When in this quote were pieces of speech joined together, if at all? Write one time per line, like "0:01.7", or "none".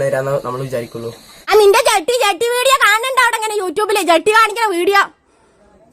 0:01.5